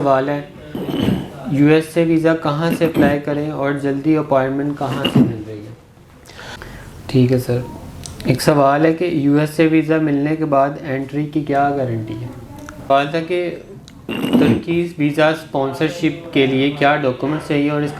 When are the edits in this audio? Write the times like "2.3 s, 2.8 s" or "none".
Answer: 6.5 s, 12.9 s

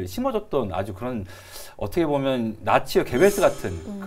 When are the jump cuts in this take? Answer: none

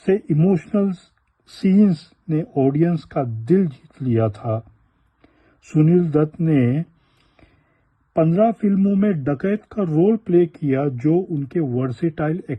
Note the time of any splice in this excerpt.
none

